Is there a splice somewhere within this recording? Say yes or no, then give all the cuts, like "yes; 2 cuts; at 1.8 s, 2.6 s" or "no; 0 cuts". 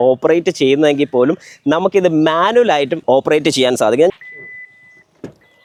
no; 0 cuts